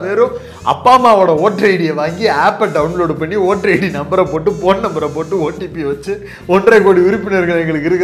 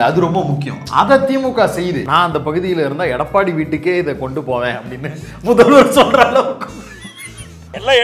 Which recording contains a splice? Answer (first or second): second